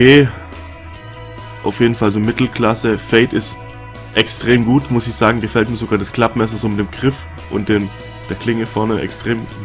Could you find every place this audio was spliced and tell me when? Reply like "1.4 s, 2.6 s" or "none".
6.3 s